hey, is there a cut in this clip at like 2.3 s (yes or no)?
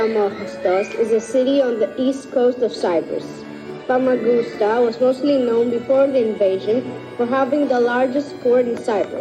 no